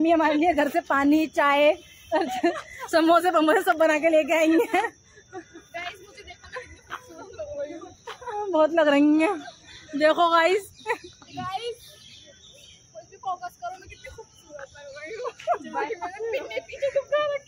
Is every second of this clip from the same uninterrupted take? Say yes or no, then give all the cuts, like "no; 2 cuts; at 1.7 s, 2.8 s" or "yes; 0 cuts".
yes; 0 cuts